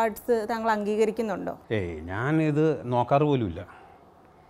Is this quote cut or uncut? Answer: cut